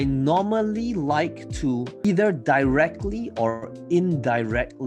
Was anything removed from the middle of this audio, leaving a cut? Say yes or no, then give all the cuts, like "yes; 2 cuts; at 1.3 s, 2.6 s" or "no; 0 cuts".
yes; 1 cut; at 2.0 s